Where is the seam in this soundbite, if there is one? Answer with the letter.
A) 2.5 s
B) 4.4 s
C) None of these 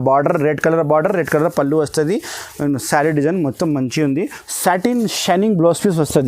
B